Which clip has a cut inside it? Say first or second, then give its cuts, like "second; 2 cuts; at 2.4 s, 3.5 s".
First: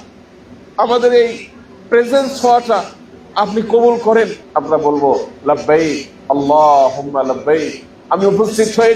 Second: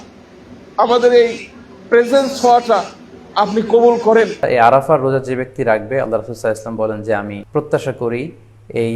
second; 2 cuts; at 4.5 s, 7.4 s